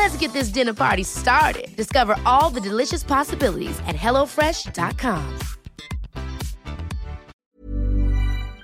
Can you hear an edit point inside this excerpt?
yes; 1 cut; at 7.3 s

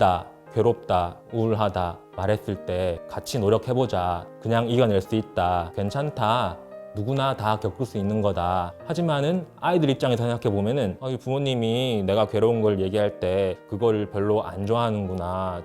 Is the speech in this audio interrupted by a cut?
yes; 3 cuts; at 3.0 s, 8.7 s, 11.0 s

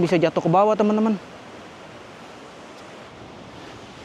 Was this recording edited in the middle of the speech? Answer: yes; 1 cut; at 3.1 s

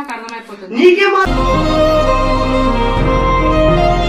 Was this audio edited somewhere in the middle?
yes; 1 cut; at 1.2 s

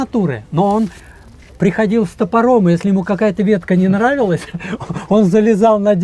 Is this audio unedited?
yes; 0 cuts

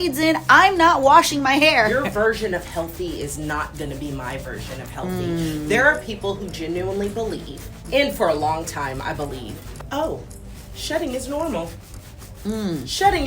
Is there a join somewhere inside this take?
yes; 3 cuts; at 1.9 s, 7.8 s, 9.7 s

